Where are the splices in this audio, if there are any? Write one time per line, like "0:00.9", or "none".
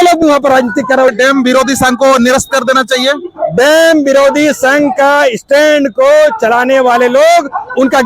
0:01.1